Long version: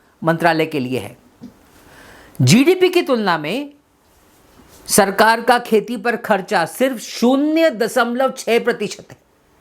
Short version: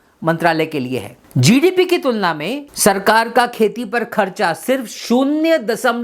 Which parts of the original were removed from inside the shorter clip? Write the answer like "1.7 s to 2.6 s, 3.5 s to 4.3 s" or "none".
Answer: 1.2 s to 2.2 s, 3.7 s to 4.7 s